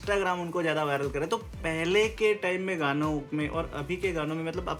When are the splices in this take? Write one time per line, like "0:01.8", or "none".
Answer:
none